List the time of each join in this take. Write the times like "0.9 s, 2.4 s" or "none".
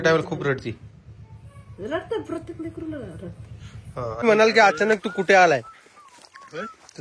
4.2 s